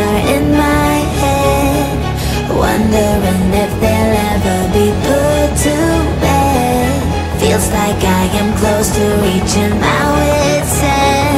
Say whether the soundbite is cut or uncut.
uncut